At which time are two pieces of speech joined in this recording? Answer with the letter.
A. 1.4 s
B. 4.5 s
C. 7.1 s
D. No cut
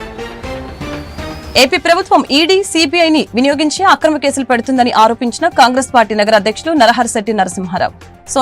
A